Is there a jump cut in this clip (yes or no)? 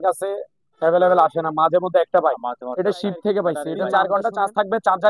yes